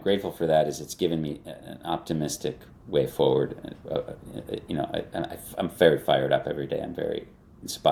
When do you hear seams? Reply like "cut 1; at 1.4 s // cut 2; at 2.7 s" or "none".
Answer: none